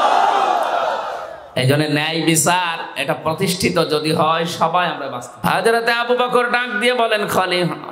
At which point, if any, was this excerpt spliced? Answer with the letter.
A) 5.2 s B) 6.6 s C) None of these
A